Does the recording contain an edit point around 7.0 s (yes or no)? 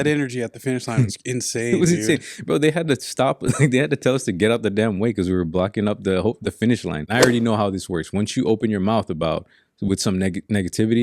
yes